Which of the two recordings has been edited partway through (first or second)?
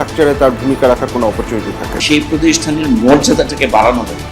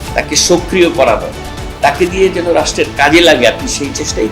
first